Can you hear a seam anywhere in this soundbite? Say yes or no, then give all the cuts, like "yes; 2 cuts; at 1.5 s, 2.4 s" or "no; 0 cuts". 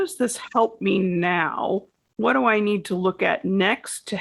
yes; 1 cut; at 2.0 s